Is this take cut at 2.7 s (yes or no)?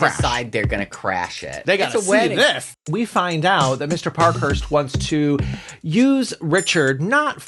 yes